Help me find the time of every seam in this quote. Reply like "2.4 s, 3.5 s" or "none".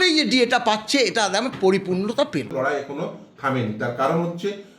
2.5 s